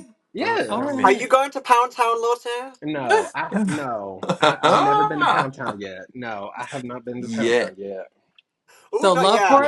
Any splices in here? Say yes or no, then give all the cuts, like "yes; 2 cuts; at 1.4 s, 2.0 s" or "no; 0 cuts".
no; 0 cuts